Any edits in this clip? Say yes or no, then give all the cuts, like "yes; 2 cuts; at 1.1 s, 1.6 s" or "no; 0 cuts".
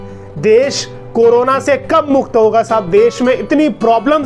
no; 0 cuts